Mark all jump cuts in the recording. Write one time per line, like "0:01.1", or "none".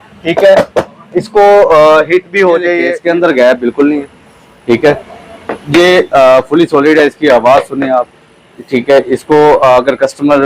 0:02.9